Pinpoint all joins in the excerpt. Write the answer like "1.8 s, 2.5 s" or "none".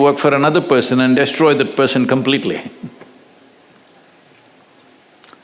none